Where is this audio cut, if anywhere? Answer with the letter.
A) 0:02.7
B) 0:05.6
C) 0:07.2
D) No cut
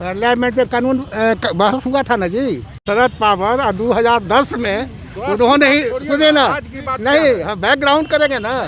A